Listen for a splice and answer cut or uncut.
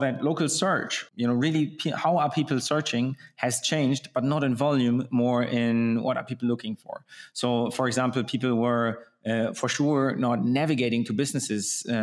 cut